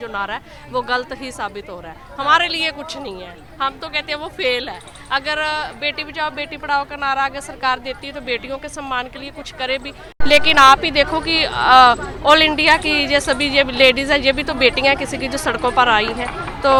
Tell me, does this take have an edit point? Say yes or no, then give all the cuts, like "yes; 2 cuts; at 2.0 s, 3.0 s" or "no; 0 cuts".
no; 0 cuts